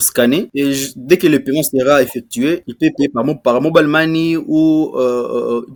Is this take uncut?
yes; 0 cuts

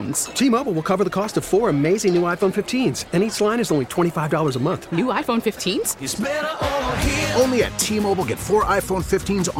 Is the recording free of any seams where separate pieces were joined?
yes; 0 cuts

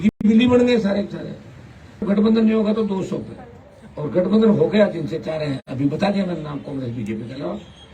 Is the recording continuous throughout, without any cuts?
no; 1 cut; at 2.0 s

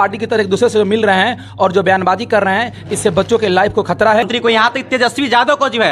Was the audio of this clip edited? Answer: yes; 1 cut; at 4.2 s

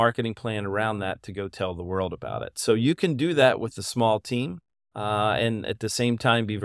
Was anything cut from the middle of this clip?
no; 0 cuts

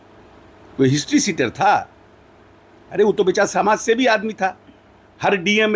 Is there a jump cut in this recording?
no; 0 cuts

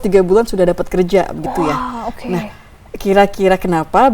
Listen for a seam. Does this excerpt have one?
no; 0 cuts

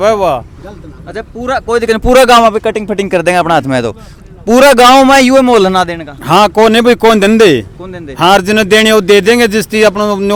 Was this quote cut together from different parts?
no; 0 cuts

